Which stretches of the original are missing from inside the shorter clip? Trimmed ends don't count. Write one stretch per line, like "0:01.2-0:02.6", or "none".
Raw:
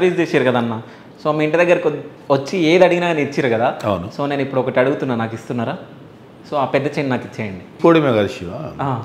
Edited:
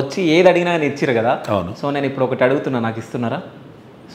none